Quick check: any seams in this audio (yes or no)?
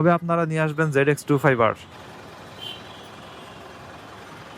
yes